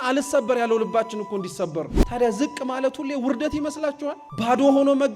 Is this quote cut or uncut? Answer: cut